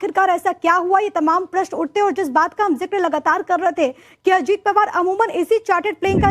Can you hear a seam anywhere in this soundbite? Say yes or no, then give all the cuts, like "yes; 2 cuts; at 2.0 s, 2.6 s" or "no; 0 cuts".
yes; 1 cut; at 3.4 s